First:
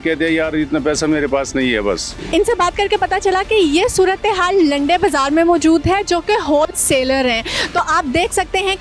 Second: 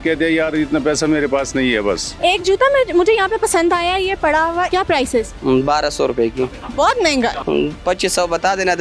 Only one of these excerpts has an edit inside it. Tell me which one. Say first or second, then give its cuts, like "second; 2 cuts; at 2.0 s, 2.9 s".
second; 3 cuts; at 2.1 s, 4.7 s, 7.4 s